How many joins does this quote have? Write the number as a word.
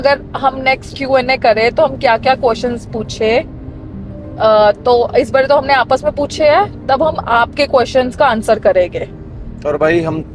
zero